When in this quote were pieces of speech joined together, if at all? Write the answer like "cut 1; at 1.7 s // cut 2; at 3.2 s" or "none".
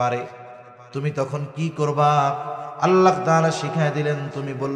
none